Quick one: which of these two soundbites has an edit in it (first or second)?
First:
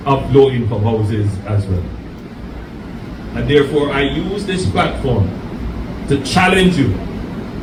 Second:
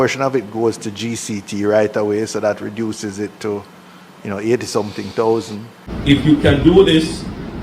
second